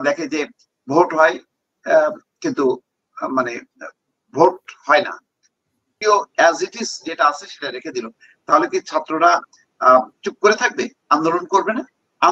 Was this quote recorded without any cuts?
no; 1 cut; at 5.9 s

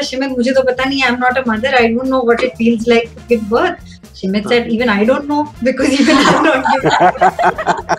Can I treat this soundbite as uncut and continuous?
no; 1 cut; at 3.9 s

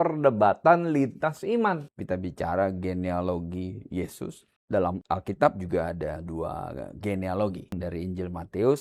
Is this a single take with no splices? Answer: no; 4 cuts; at 1.9 s, 4.5 s, 6.2 s, 7.8 s

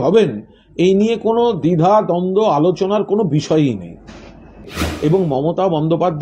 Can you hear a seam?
yes; 1 cut; at 4.8 s

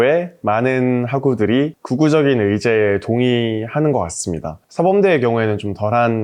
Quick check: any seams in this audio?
no; 0 cuts

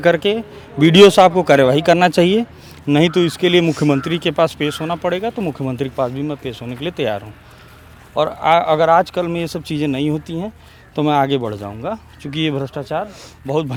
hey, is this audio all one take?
yes; 0 cuts

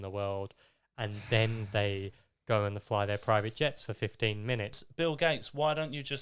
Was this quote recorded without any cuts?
no; 1 cut; at 4.8 s

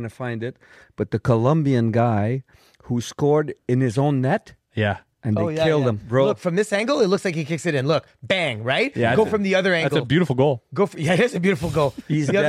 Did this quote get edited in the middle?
yes; 1 cut; at 6.0 s

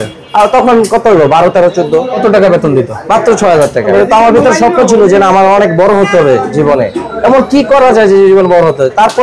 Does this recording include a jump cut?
yes; 2 cuts; at 2.1 s, 3.9 s

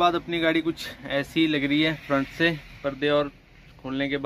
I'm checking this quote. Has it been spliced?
no; 0 cuts

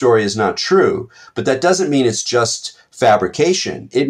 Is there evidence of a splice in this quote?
no; 0 cuts

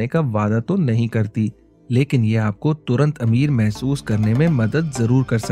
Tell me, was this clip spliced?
no; 0 cuts

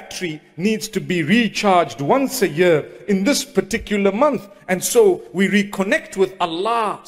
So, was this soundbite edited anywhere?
no; 0 cuts

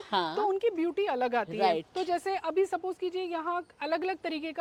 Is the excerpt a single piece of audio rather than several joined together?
yes; 0 cuts

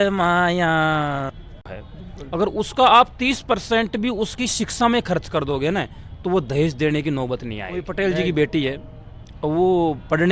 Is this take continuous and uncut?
no; 2 cuts; at 1.8 s, 7.9 s

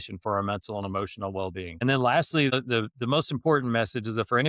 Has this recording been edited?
yes; 2 cuts; at 1.7 s, 2.5 s

